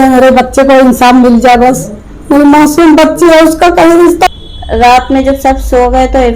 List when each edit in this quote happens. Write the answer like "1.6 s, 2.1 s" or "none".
4.3 s

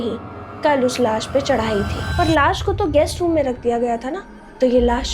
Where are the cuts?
2.0 s

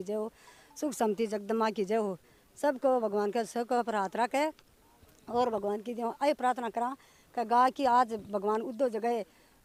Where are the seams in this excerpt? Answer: none

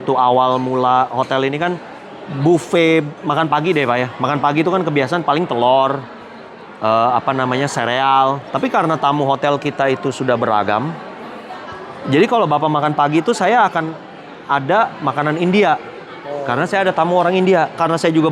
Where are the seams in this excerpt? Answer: 3.2 s

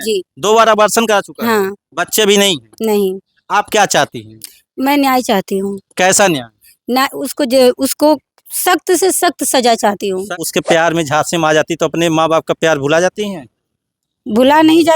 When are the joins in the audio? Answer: 10.4 s

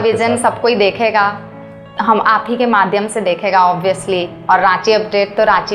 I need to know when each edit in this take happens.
none

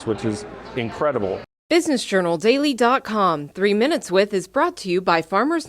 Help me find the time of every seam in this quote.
1.5 s

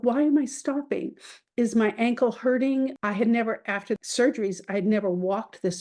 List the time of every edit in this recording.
3.0 s, 4.1 s

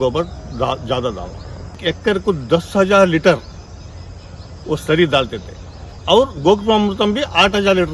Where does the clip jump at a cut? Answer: 1.8 s, 5.9 s

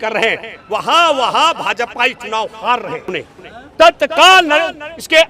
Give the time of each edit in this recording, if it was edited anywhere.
3.1 s

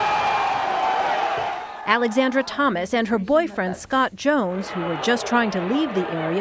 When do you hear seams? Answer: none

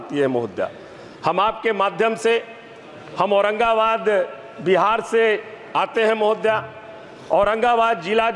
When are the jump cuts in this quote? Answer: none

